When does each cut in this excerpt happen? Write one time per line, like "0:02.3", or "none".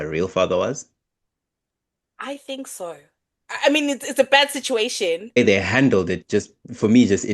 0:05.4